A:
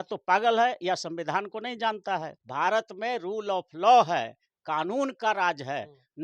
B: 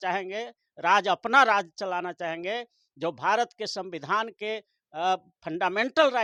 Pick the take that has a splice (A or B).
A